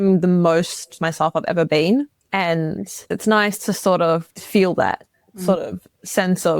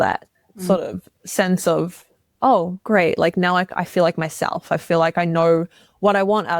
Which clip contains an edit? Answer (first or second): first